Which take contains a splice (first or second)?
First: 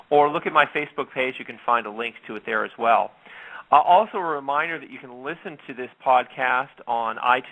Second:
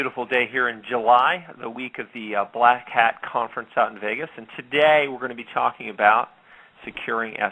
first